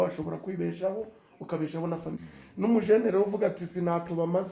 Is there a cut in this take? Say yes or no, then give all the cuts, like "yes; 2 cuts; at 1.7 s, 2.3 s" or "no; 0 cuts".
yes; 1 cut; at 2.2 s